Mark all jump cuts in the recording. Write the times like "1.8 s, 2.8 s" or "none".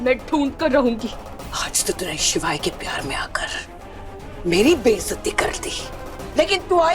1.2 s